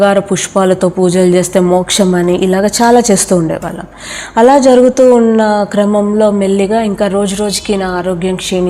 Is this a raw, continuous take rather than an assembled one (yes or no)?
yes